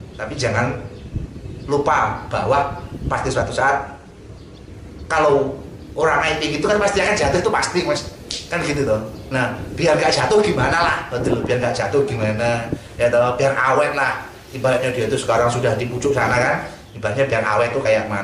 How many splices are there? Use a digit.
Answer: 0